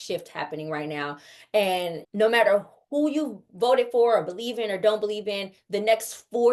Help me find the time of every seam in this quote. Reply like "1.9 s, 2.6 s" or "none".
none